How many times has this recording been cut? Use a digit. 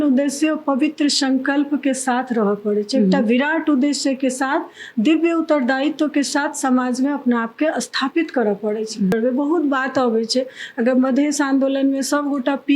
1